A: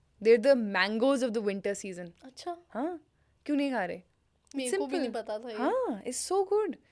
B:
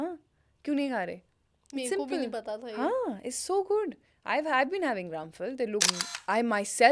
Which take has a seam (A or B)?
B